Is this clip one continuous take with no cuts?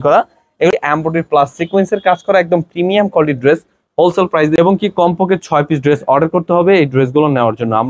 no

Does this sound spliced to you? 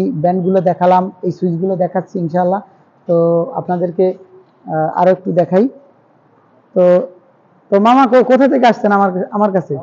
no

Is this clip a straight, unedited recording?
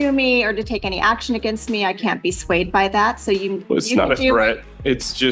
yes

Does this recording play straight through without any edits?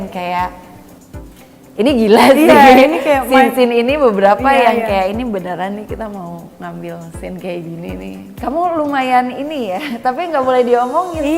no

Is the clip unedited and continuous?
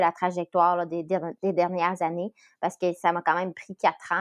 yes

